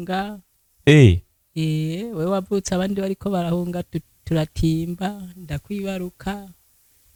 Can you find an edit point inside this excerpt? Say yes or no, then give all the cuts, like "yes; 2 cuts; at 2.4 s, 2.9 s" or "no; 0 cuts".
no; 0 cuts